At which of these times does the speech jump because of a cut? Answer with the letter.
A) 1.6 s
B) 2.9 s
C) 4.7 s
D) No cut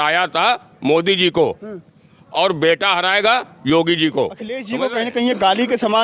C